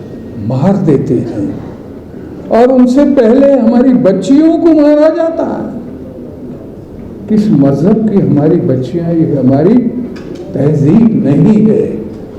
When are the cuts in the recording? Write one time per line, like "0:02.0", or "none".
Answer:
none